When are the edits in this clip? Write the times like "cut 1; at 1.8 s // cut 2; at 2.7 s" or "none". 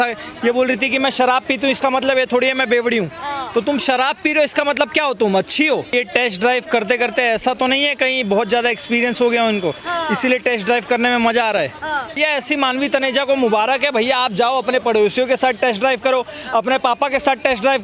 cut 1; at 5.9 s // cut 2; at 12.2 s